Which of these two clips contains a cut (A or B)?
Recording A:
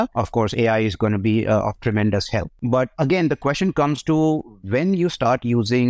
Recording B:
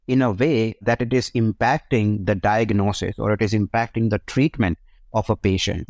A